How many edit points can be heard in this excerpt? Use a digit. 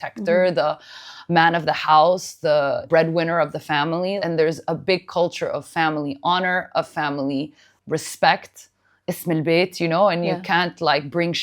2